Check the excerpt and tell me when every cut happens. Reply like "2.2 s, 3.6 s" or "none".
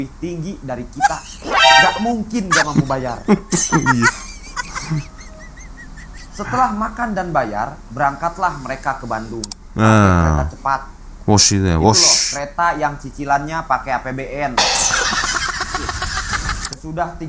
none